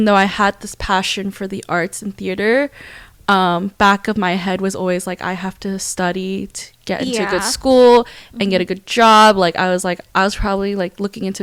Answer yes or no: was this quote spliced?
no